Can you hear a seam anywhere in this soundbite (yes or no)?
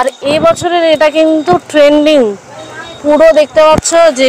no